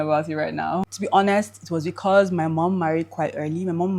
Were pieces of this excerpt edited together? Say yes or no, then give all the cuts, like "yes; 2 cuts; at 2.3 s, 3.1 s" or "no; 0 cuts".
yes; 1 cut; at 0.9 s